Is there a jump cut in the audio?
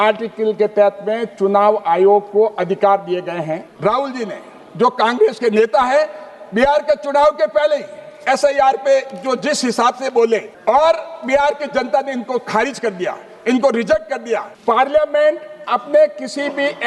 yes; 2 cuts; at 3.7 s, 14.6 s

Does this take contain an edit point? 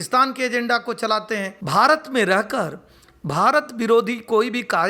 yes; 1 cut; at 1.5 s

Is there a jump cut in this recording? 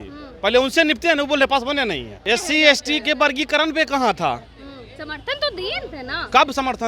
yes; 1 cut; at 2.2 s

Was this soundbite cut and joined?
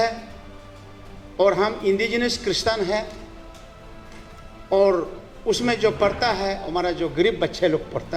no; 0 cuts

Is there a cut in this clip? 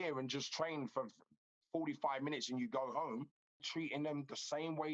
yes; 1 cut; at 3.6 s

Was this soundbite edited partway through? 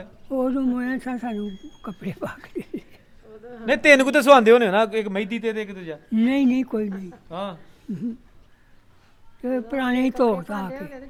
no; 0 cuts

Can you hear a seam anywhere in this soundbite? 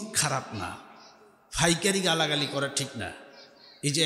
no; 0 cuts

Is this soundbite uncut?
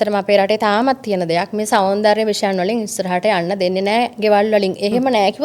yes; 0 cuts

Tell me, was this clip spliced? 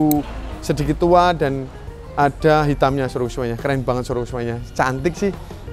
no; 0 cuts

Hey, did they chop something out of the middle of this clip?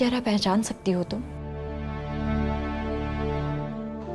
no; 0 cuts

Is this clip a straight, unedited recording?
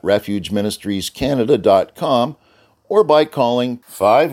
yes; 0 cuts

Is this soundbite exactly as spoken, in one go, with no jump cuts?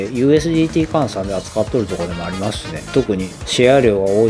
no; 1 cut; at 2.7 s

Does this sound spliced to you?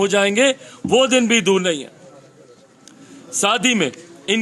no; 0 cuts

